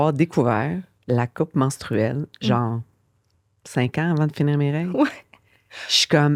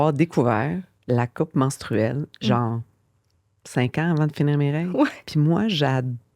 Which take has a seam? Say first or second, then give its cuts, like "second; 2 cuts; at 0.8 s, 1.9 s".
second; 1 cut; at 5.2 s